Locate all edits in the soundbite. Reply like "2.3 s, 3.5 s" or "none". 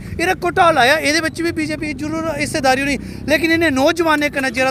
none